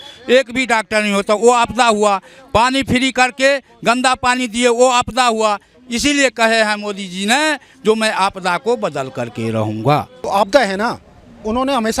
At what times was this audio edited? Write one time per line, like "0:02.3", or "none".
0:10.2